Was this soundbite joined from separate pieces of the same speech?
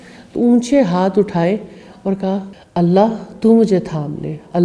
yes; 1 cut; at 2.6 s

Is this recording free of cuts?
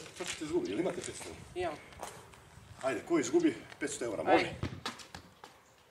no; 1 cut; at 4.6 s

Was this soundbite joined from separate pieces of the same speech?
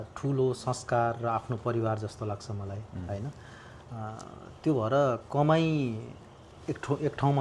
no; 0 cuts

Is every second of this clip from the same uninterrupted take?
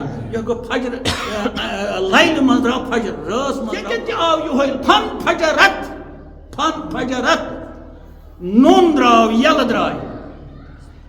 no; 1 cut; at 4.0 s

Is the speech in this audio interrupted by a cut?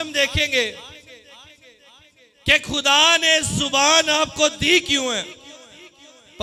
no; 0 cuts

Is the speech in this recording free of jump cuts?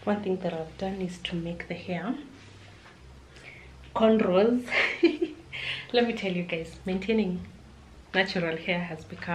yes; 0 cuts

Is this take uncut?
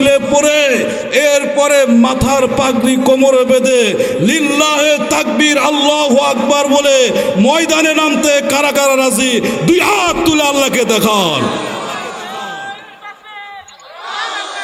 yes; 0 cuts

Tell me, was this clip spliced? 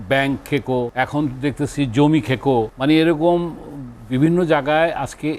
yes; 2 cuts; at 0.9 s, 2.7 s

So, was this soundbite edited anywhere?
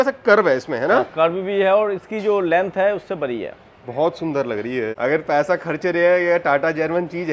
no; 0 cuts

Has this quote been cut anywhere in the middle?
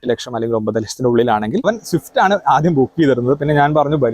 yes; 1 cut; at 1.6 s

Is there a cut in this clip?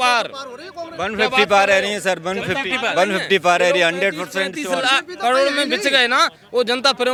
no; 0 cuts

